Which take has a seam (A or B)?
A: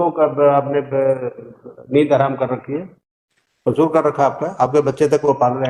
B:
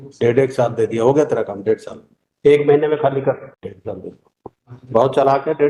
B